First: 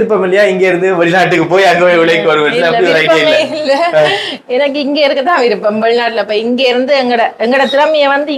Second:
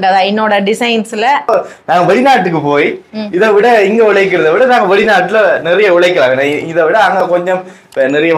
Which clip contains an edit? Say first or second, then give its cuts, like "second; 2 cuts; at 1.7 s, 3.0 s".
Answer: second; 1 cut; at 1.5 s